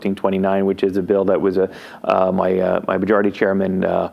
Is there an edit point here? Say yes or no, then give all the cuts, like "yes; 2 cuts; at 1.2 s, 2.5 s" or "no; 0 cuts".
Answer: no; 0 cuts